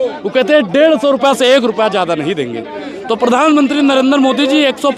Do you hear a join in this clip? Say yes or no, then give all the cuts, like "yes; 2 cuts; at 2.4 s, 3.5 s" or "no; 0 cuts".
no; 0 cuts